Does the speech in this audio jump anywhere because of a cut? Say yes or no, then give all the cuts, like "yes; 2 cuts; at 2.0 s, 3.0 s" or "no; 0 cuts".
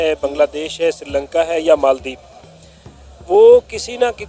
no; 0 cuts